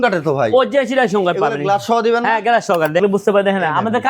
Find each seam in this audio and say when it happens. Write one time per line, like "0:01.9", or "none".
0:03.0